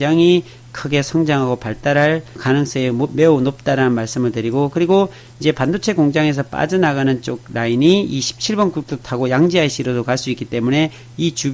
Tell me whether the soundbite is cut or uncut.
uncut